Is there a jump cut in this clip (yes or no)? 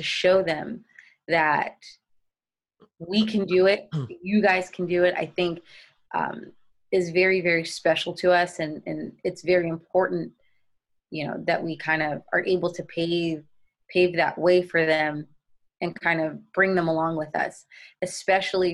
no